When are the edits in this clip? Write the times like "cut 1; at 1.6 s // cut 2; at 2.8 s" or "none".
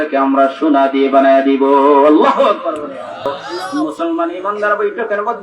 cut 1; at 3.5 s